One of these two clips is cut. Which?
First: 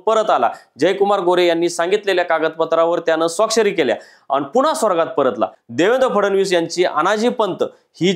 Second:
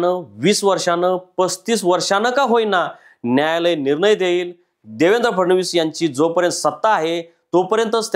first; 1 cut; at 5.6 s

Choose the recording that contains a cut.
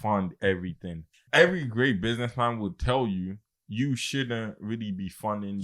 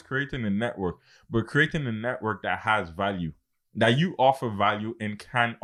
first; 1 cut; at 1.1 s

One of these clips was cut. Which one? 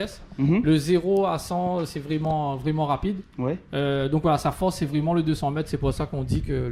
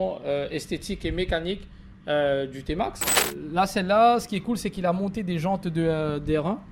second; 1 cut; at 3.2 s

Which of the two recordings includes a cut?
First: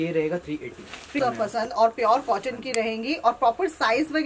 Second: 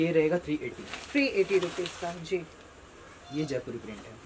first; 1 cut; at 1.2 s

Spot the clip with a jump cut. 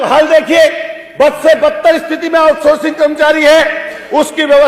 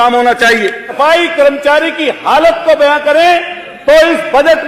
second; 1 cut; at 0.9 s

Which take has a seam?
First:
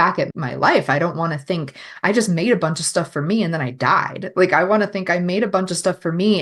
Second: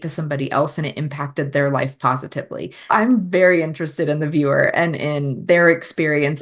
second; 1 cut; at 2.9 s

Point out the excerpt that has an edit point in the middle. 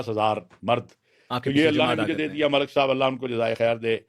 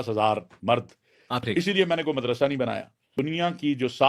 second; 2 cuts; at 1.4 s, 3.1 s

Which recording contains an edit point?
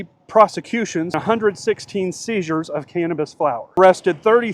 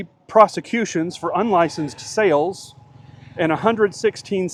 first; 2 cuts; at 1.1 s, 3.8 s

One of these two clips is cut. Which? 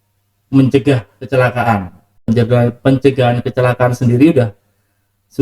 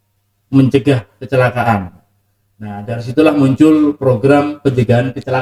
first; 1 cut; at 2.1 s

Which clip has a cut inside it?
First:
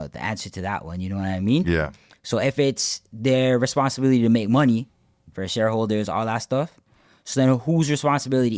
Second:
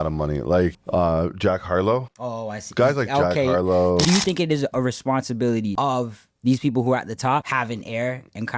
second; 5 cuts; at 0.8 s, 2.2 s, 4.0 s, 5.7 s, 7.5 s

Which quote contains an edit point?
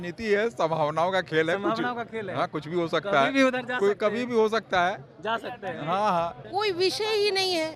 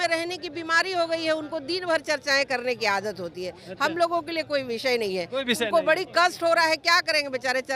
first; 1 cut; at 6.4 s

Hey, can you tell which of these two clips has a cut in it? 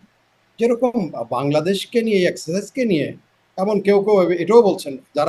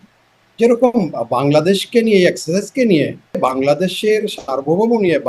second; 1 cut; at 3.4 s

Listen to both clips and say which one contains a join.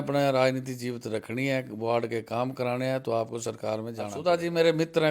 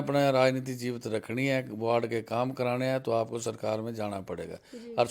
first; 1 cut; at 4.1 s

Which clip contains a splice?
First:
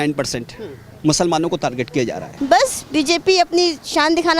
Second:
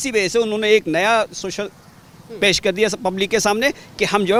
first; 1 cut; at 2.2 s

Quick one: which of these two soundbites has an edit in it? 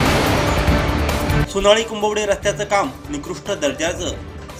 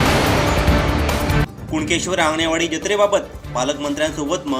second; 1 cut; at 1.4 s

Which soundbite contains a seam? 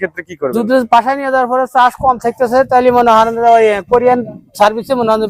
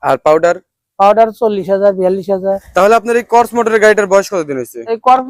second; 1 cut; at 2.6 s

